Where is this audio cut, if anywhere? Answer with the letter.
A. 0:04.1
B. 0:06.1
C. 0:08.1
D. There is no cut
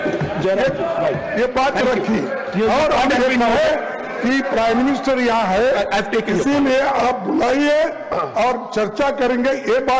D